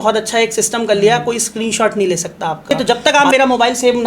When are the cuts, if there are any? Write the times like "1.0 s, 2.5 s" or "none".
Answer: 2.7 s